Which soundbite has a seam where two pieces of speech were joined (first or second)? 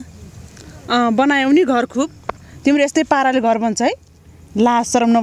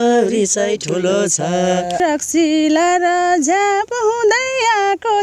second